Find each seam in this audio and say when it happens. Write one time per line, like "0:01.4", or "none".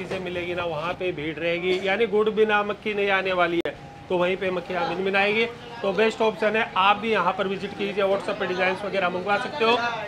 none